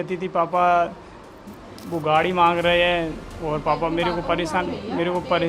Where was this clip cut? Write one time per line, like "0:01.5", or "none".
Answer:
0:03.3